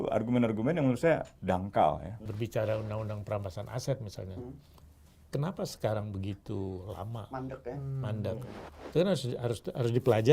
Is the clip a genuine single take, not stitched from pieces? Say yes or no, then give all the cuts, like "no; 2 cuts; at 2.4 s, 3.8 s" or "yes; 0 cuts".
no; 1 cut; at 2.4 s